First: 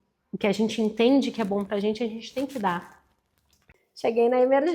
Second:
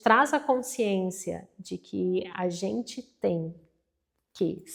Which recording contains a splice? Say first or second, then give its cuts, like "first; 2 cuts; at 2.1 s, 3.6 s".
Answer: first; 1 cut; at 3.6 s